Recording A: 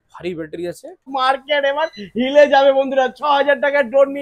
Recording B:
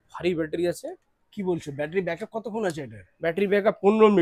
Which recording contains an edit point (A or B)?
A